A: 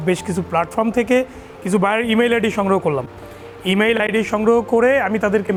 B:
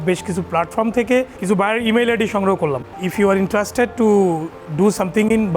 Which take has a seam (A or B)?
B